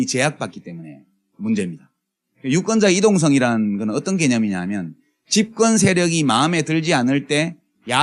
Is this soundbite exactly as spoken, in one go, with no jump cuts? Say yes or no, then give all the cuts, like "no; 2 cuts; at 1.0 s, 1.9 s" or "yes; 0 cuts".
yes; 0 cuts